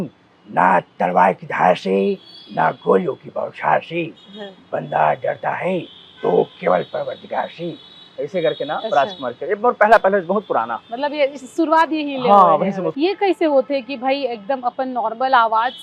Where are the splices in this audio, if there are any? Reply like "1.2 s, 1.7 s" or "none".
12.9 s

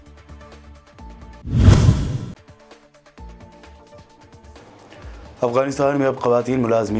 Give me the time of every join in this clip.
1.4 s

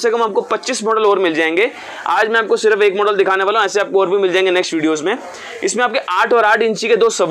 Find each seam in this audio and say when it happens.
none

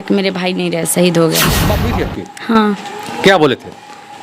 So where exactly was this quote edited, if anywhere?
1.7 s

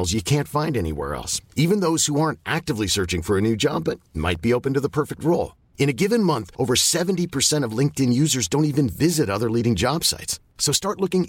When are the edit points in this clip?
none

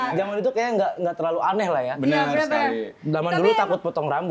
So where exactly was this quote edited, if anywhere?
none

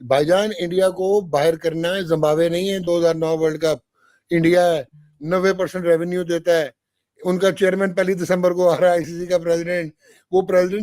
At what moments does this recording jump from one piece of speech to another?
none

